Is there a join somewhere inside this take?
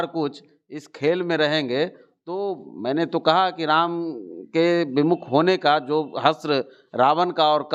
no; 0 cuts

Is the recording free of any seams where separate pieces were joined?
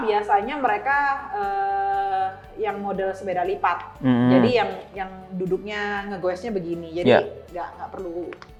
yes; 0 cuts

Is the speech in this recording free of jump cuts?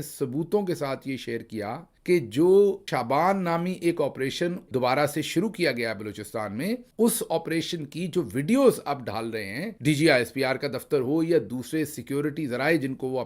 no; 2 cuts; at 2.8 s, 4.6 s

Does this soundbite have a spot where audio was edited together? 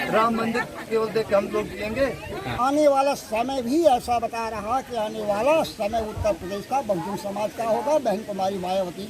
yes; 1 cut; at 2.5 s

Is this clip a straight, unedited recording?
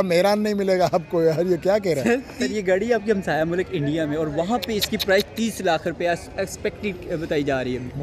no; 1 cut; at 2.4 s

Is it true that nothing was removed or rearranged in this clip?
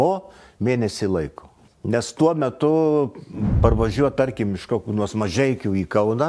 yes; 0 cuts

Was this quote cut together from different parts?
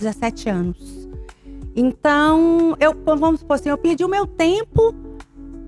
no; 0 cuts

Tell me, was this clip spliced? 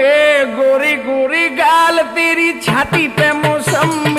no; 0 cuts

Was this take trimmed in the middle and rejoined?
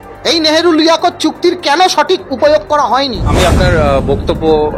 yes; 1 cut; at 3.2 s

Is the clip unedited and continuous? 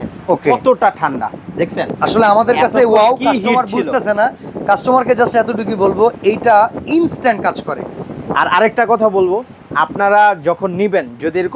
yes; 0 cuts

